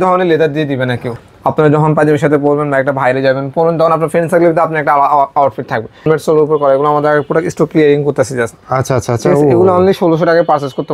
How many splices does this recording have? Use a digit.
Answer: 2